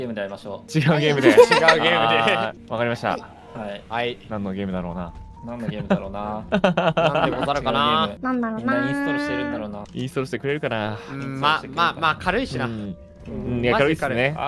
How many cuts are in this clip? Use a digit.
0